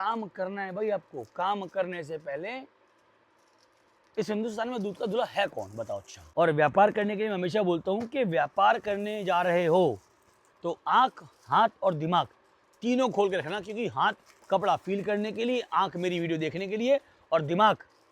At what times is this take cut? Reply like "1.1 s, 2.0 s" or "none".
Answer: 6.2 s